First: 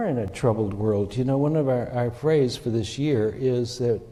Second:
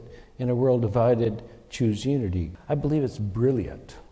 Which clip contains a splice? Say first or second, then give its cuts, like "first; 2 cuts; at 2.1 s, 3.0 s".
second; 1 cut; at 2.6 s